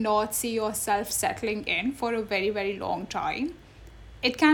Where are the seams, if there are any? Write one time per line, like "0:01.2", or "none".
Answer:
none

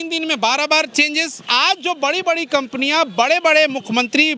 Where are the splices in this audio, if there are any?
0:01.4

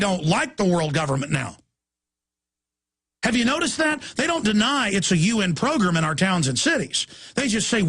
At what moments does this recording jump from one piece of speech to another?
0:01.6

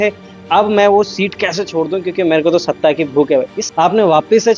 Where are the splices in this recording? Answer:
0:03.6

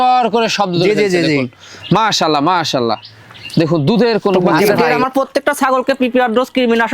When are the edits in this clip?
0:04.7

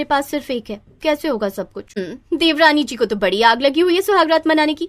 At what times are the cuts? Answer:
0:02.1

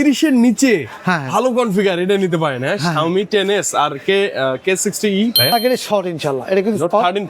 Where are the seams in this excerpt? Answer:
0:05.5

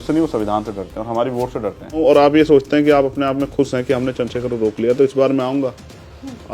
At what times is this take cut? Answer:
0:02.0

